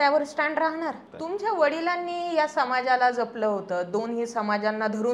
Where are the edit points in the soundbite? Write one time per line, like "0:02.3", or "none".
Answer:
0:01.1